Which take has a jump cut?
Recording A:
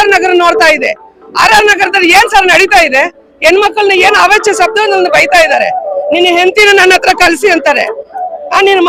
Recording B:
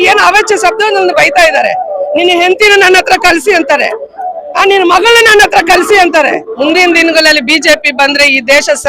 B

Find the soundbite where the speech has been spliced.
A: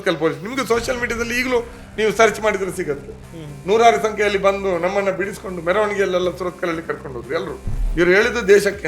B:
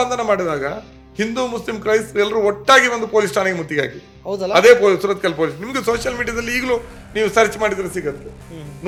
A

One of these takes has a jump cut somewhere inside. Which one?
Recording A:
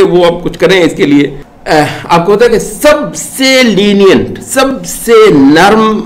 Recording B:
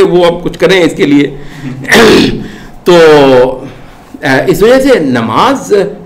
A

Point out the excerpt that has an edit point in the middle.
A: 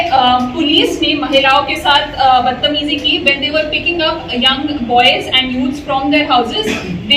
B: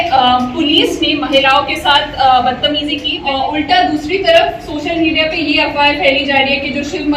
B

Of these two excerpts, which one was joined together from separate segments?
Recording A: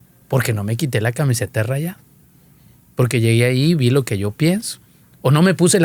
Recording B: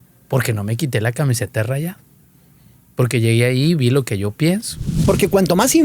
B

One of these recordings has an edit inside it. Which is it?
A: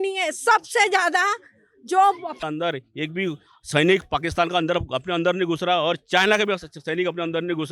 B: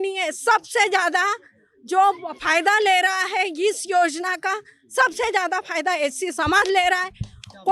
A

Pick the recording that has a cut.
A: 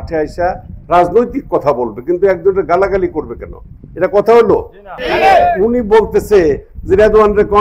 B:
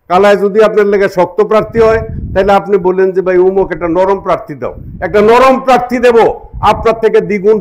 A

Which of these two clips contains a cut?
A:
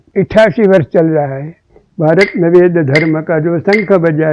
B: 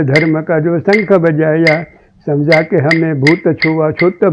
A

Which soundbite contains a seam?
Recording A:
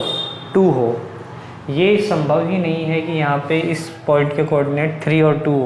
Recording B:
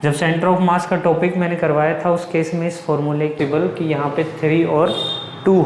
B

